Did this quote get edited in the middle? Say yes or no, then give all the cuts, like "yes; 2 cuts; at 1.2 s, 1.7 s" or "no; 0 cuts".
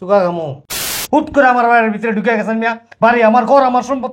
yes; 1 cut; at 1.0 s